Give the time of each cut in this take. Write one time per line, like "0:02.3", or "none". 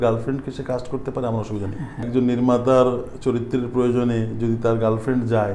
0:02.1